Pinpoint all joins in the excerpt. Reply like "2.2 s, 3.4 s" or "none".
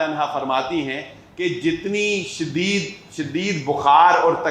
none